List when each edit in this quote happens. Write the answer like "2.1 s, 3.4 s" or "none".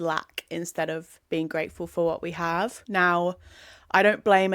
1.1 s

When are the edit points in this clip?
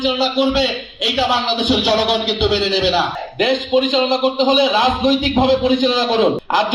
3.2 s

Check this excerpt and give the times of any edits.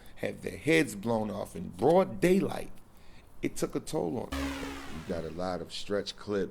4.4 s

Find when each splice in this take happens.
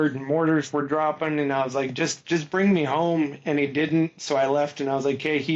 none

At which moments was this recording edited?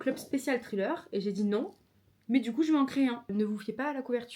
3.3 s

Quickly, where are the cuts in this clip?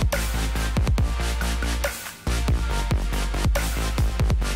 none

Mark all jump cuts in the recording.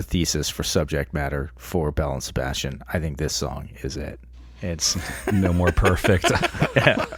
none

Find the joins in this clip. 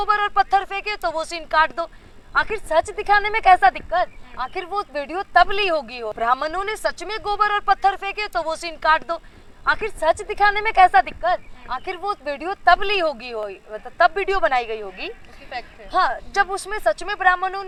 none

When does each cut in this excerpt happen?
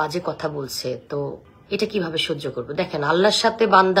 1.5 s

